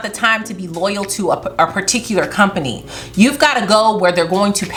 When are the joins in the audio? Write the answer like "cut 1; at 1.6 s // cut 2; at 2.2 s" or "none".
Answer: none